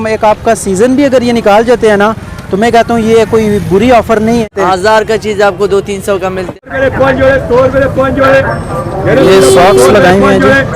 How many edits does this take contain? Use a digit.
2